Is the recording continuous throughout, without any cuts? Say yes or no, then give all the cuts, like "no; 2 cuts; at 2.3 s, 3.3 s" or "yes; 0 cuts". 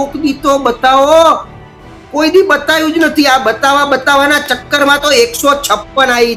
yes; 0 cuts